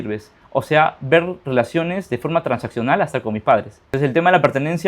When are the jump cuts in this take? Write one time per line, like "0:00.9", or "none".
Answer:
0:03.9